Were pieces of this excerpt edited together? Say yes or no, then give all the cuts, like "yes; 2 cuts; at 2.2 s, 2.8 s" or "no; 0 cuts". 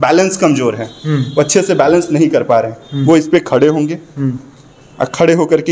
no; 0 cuts